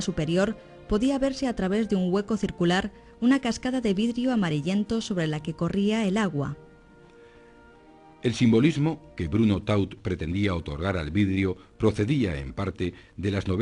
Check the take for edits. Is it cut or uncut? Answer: cut